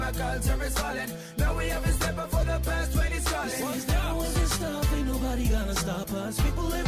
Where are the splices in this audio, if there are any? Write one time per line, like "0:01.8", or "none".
0:03.7